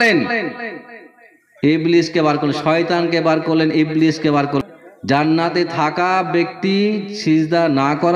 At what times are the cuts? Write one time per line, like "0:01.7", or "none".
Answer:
0:04.6